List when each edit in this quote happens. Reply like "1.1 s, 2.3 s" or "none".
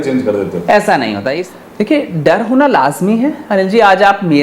1.4 s